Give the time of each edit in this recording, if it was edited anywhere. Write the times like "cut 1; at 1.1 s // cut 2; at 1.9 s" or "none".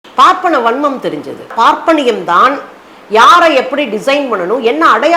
cut 1; at 1.5 s